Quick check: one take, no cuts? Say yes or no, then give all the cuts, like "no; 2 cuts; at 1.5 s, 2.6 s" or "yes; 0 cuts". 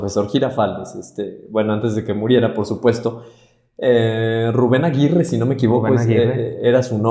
yes; 0 cuts